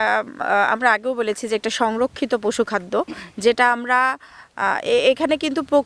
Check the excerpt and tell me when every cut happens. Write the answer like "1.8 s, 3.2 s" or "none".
none